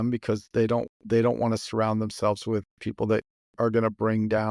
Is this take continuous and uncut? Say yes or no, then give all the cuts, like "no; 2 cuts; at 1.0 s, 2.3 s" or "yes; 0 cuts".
no; 1 cut; at 3.4 s